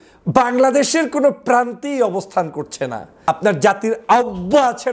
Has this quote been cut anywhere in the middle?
yes; 1 cut; at 3.3 s

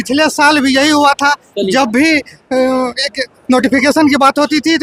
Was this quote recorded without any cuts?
yes; 0 cuts

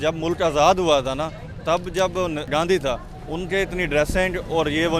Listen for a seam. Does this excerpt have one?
yes; 1 cut; at 2.5 s

